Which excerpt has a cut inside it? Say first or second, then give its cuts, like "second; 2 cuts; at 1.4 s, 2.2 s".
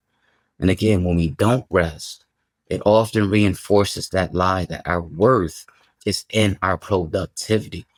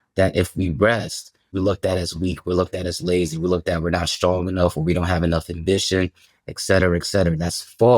second; 1 cut; at 1.5 s